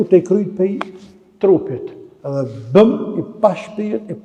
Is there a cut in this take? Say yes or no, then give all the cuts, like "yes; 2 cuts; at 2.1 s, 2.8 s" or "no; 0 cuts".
no; 0 cuts